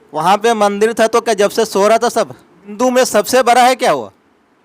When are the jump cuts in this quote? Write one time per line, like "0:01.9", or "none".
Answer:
0:02.7